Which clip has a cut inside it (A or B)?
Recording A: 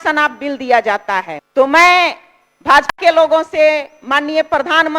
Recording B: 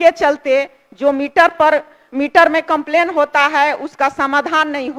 A